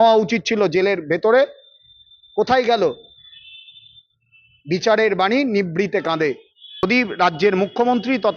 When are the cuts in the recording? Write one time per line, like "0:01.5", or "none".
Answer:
0:06.8